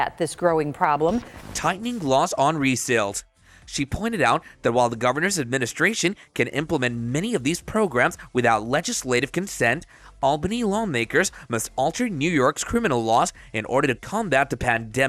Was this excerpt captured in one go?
yes; 0 cuts

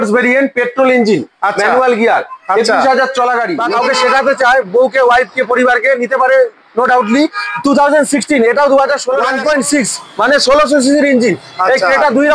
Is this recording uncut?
no; 2 cuts; at 3.6 s, 9.3 s

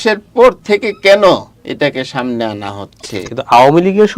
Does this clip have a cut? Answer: yes; 2 cuts; at 1.6 s, 3.3 s

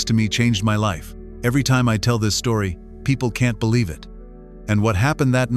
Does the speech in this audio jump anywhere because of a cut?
no; 0 cuts

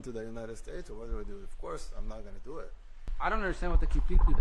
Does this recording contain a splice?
yes; 1 cut; at 3.0 s

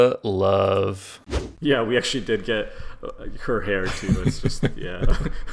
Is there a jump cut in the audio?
yes; 1 cut; at 1.4 s

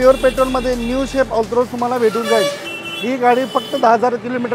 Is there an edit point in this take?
no; 0 cuts

